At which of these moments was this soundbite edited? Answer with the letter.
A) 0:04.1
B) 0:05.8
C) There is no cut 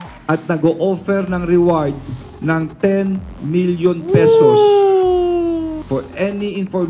B